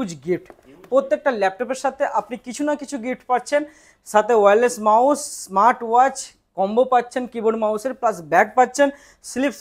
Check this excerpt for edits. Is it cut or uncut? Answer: uncut